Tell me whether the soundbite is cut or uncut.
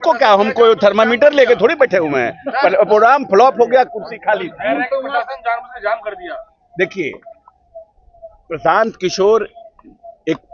uncut